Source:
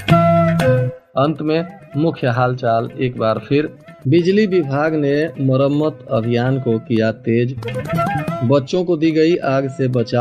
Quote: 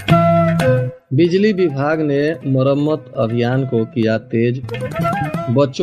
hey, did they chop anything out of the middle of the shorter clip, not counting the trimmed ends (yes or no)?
yes